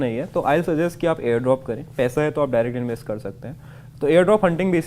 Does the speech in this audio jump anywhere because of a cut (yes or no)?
no